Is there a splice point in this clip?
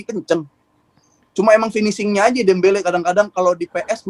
no; 0 cuts

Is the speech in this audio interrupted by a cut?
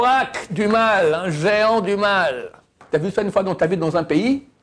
yes; 1 cut; at 2.7 s

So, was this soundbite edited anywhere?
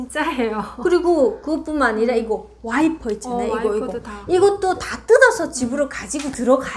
no; 0 cuts

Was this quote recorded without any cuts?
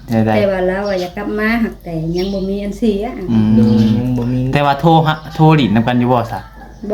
yes; 0 cuts

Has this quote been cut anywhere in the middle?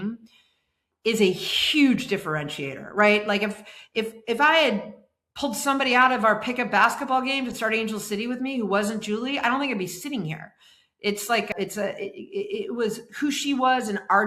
no; 0 cuts

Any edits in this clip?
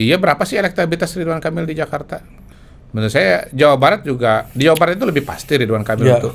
yes; 1 cut; at 2.4 s

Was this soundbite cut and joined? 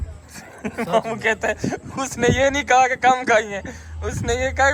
no; 0 cuts

